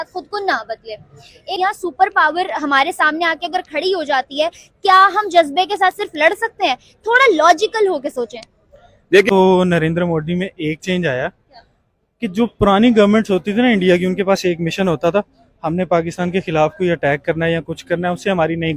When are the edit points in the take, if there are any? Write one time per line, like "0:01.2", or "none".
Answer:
0:01.6
0:09.3